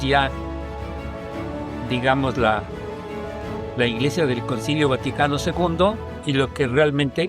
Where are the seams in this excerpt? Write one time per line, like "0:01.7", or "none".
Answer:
0:06.1